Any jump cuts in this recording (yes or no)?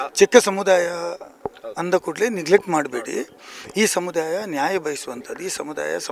no